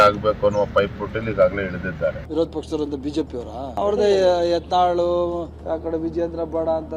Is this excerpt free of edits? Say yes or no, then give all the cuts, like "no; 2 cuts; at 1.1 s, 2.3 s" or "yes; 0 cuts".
yes; 0 cuts